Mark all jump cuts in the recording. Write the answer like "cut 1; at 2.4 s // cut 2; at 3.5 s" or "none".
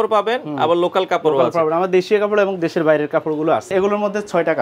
cut 1; at 3.7 s